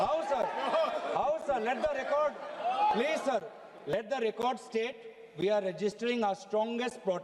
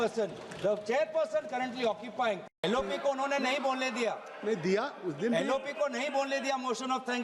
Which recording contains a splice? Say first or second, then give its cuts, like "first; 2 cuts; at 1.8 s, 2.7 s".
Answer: second; 1 cut; at 2.6 s